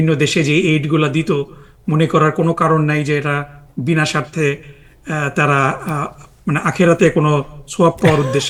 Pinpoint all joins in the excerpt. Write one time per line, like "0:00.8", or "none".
none